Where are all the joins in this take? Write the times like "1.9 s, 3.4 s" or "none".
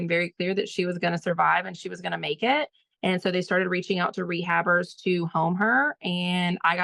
none